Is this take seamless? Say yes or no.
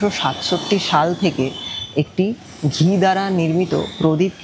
yes